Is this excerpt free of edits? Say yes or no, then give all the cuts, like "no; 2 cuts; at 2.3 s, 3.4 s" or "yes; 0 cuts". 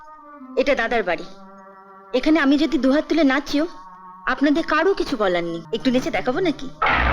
no; 1 cut; at 5.6 s